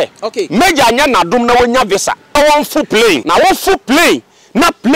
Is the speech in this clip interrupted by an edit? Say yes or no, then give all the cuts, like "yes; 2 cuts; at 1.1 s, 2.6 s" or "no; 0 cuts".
yes; 2 cuts; at 2.3 s, 3.2 s